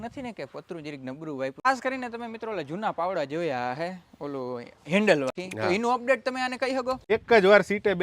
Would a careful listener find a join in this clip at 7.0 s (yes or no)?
yes